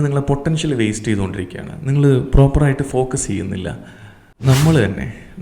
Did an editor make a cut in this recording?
yes; 1 cut; at 4.3 s

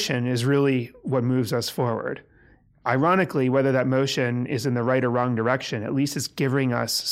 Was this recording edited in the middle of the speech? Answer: no; 0 cuts

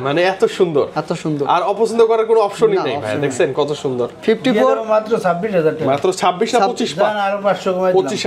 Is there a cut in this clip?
no; 0 cuts

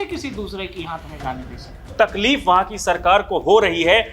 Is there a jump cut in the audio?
yes; 1 cut; at 1.9 s

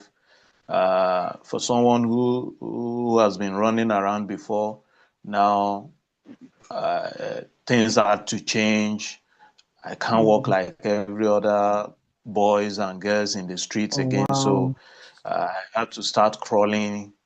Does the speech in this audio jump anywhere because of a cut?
no; 0 cuts

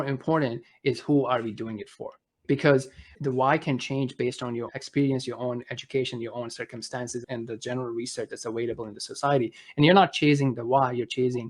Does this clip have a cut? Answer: yes; 4 cuts; at 2.4 s, 3.1 s, 4.7 s, 7.2 s

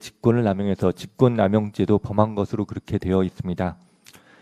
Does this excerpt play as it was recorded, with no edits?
yes; 0 cuts

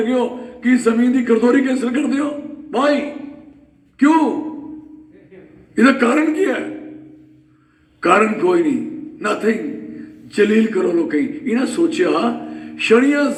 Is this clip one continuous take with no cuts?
yes; 0 cuts

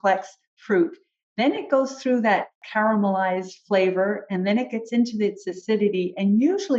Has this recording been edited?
no; 0 cuts

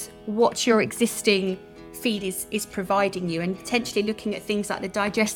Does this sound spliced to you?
no; 0 cuts

